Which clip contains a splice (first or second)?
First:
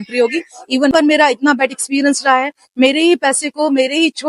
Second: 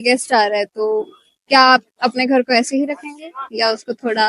first